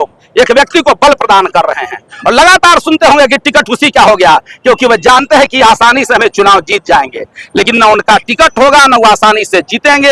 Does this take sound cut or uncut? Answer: uncut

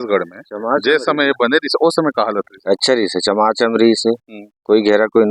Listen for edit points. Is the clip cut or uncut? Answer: uncut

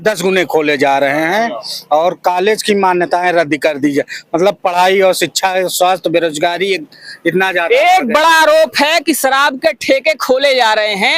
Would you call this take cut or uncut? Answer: uncut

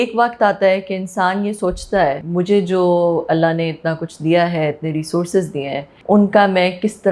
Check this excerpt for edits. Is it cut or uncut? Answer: cut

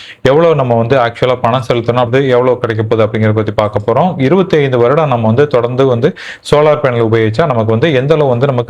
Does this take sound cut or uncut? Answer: cut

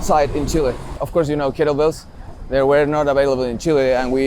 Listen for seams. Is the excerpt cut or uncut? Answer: cut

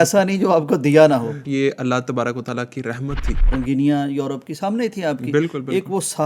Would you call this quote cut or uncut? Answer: cut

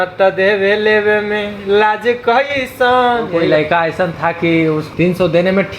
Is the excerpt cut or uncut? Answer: cut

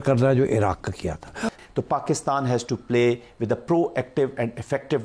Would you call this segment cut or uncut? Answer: cut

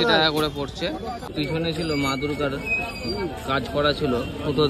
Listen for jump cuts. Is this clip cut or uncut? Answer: cut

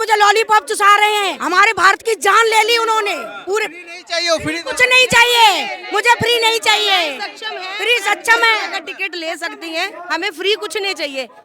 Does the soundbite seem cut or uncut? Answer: uncut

